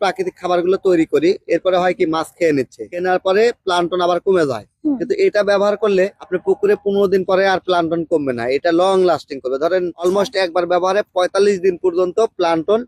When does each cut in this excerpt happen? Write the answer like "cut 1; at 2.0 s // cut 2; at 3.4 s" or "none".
cut 1; at 2.9 s